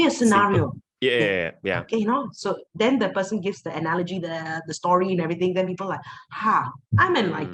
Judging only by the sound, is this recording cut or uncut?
uncut